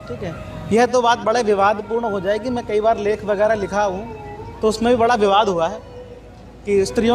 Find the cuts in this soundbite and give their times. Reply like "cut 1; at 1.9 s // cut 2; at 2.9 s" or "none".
none